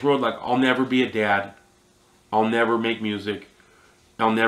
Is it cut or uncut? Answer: uncut